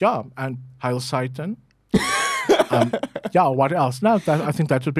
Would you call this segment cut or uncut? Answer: uncut